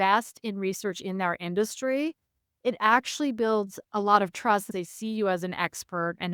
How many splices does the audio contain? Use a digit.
2